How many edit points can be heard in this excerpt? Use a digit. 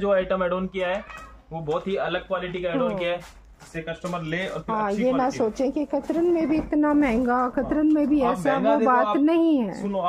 0